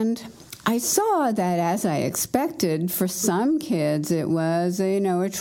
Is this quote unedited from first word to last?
yes; 0 cuts

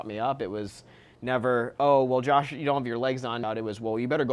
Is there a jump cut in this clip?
yes; 1 cut; at 3.4 s

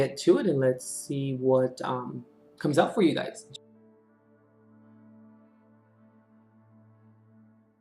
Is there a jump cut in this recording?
yes; 1 cut; at 3.4 s

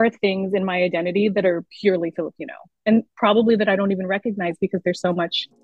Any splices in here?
no; 0 cuts

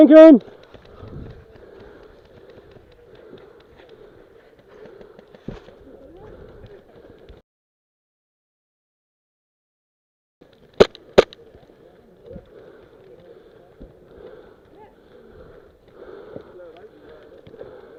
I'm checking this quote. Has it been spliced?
no; 0 cuts

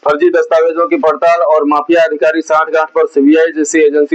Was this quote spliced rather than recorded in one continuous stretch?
no; 0 cuts

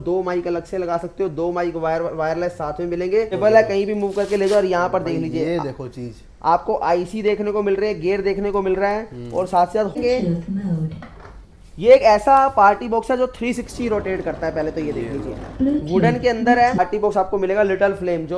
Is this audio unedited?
no; 3 cuts; at 3.3 s, 10.0 s, 16.8 s

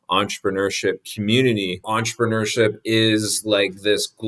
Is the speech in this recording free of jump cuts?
no; 1 cut; at 1.8 s

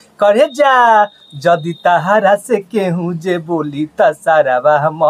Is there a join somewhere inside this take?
no; 0 cuts

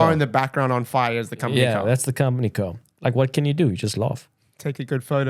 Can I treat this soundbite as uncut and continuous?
no; 1 cut; at 2.8 s

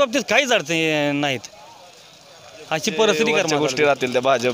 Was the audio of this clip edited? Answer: yes; 1 cut; at 3.5 s

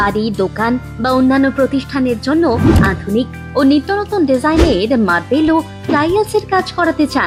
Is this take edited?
no; 0 cuts

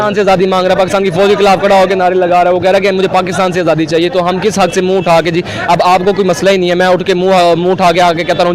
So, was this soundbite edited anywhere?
no; 0 cuts

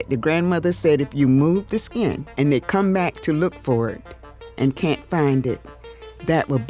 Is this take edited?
no; 0 cuts

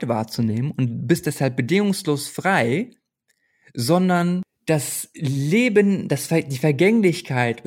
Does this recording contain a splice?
yes; 1 cut; at 4.5 s

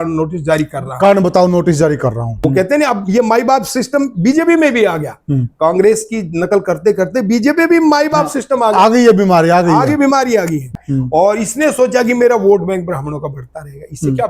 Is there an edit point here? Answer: yes; 2 cuts; at 2.3 s, 10.8 s

